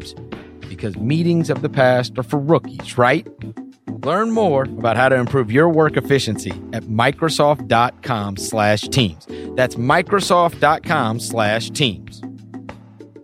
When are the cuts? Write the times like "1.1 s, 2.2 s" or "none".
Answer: 11.9 s